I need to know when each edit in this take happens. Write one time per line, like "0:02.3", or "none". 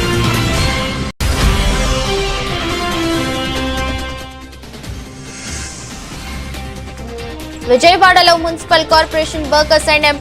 0:01.1